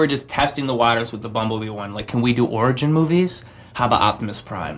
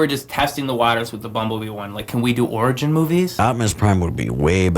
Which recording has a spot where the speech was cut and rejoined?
second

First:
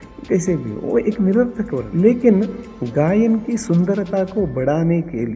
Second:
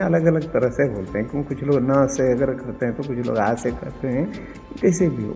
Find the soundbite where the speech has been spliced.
first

